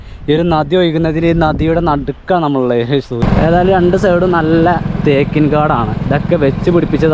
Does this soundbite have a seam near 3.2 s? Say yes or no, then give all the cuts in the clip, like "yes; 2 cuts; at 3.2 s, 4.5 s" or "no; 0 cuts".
yes; 1 cut; at 3.2 s